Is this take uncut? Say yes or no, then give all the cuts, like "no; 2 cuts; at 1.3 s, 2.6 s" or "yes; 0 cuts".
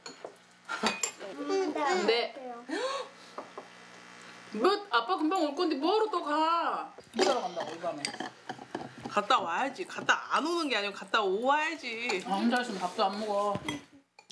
no; 2 cuts; at 1.4 s, 12.1 s